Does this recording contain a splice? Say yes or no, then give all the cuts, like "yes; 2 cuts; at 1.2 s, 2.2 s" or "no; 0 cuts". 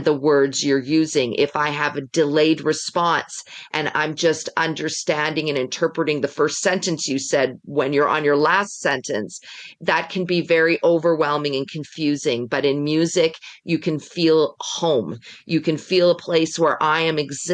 no; 0 cuts